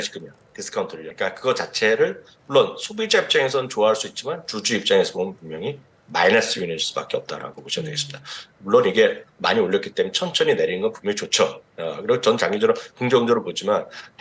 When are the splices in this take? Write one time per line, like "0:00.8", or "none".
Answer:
0:01.0